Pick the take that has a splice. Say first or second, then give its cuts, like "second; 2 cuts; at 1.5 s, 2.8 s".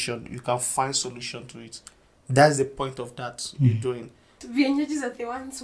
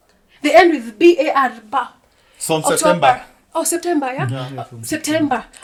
first; 1 cut; at 4.4 s